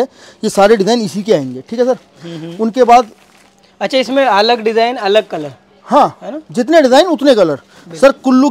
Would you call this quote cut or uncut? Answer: uncut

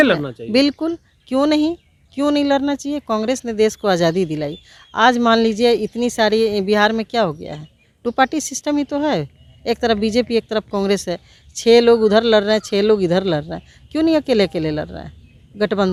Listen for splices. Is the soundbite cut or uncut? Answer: uncut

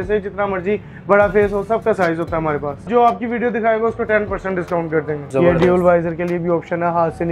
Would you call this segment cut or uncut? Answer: cut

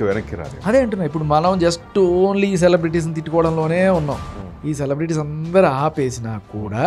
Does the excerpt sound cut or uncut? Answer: uncut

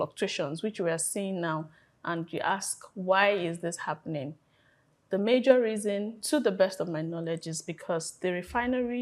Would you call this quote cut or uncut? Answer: uncut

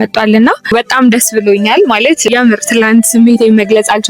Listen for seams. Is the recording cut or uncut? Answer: cut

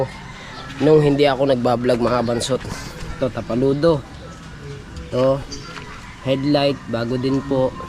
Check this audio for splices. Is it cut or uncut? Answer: uncut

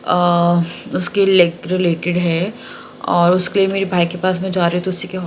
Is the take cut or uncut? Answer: uncut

